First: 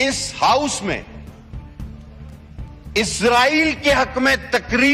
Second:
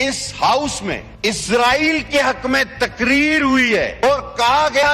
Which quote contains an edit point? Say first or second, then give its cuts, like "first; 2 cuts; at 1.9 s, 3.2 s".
second; 2 cuts; at 1.1 s, 4.1 s